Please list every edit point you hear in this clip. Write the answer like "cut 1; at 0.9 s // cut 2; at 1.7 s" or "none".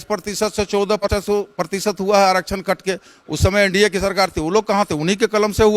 cut 1; at 1.0 s